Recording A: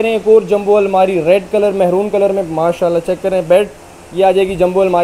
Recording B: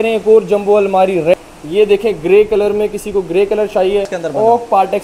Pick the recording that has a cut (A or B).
B